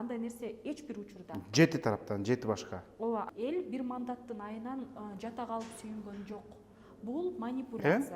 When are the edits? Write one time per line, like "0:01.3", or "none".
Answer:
0:03.3